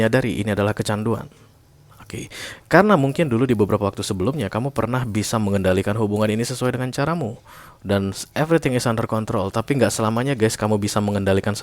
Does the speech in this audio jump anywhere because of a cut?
no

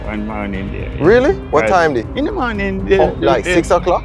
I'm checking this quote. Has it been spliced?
yes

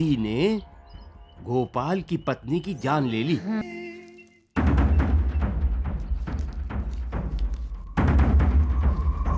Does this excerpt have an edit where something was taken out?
yes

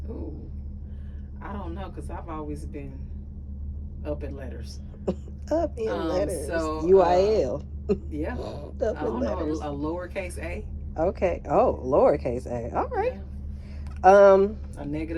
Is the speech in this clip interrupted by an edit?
no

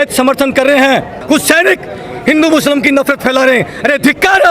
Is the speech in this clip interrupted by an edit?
yes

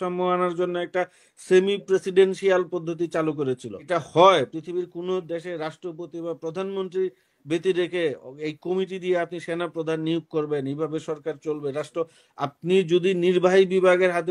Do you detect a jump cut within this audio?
yes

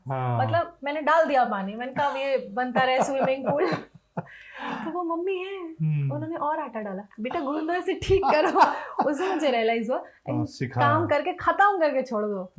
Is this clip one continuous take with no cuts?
yes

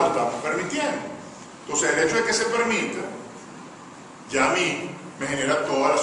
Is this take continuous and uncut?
yes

